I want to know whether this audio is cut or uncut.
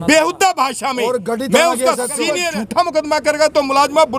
cut